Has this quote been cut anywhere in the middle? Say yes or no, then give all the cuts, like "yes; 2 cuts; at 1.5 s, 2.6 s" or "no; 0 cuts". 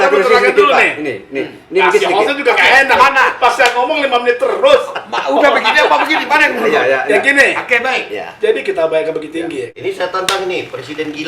yes; 1 cut; at 9.7 s